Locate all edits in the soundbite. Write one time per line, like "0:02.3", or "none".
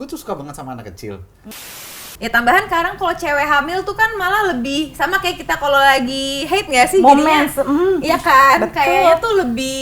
0:01.8